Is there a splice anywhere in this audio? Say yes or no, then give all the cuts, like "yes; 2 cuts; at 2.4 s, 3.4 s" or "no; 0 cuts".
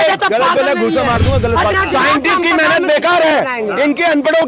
yes; 1 cut; at 1.7 s